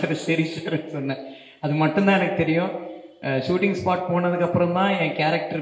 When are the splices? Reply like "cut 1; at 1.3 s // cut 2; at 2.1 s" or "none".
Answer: none